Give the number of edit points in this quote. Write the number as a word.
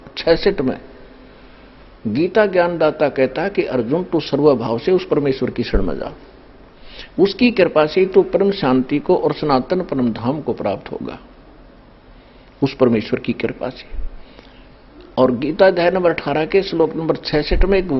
zero